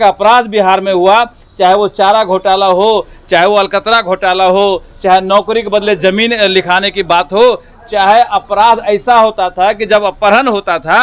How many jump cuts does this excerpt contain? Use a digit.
0